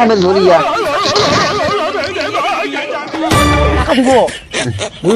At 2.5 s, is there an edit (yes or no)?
no